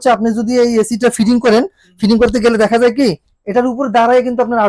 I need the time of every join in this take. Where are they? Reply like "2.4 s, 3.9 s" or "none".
none